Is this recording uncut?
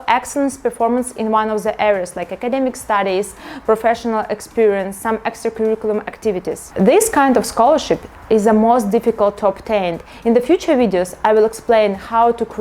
yes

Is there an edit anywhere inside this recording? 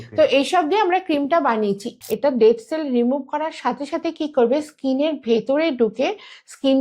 yes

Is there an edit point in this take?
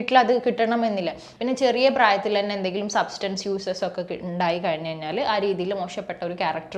yes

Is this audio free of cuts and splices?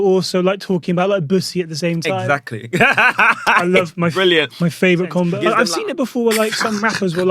no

